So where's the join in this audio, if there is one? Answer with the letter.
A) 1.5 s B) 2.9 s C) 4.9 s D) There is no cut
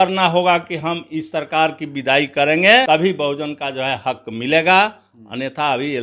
B